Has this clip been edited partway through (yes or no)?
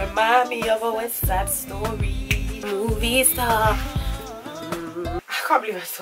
yes